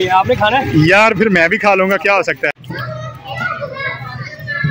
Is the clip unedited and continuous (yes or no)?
no